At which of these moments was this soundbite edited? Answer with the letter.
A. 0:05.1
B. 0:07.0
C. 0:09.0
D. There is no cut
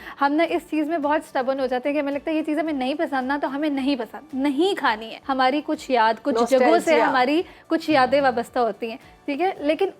A